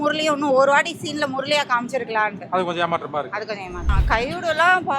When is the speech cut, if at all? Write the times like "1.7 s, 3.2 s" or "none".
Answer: 3.8 s